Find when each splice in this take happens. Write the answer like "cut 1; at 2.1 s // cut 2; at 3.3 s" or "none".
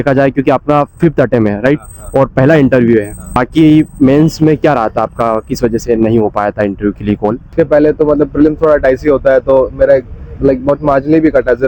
cut 1; at 3.4 s // cut 2; at 7.5 s